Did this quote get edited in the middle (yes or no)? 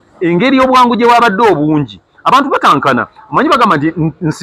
no